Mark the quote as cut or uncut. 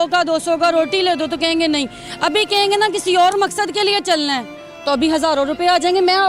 uncut